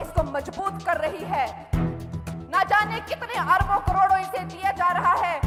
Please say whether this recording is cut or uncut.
uncut